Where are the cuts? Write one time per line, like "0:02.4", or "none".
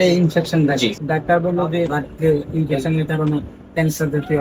0:01.0
0:02.0